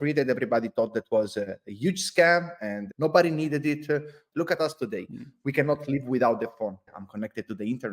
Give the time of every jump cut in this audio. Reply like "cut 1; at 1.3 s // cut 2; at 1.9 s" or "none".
cut 1; at 2.8 s // cut 2; at 4.2 s // cut 3; at 6.9 s